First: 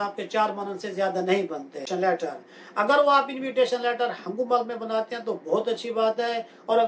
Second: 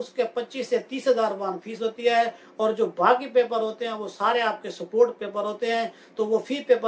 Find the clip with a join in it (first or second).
first